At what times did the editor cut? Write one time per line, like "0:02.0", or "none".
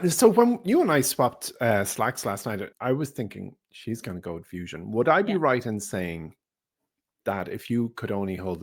0:02.7